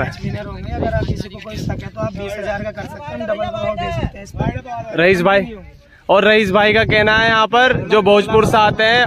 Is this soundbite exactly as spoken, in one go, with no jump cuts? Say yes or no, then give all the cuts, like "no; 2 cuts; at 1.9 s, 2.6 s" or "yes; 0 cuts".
yes; 0 cuts